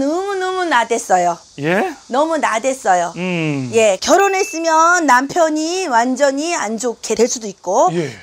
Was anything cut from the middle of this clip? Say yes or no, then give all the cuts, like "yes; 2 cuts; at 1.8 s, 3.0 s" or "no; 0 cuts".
no; 0 cuts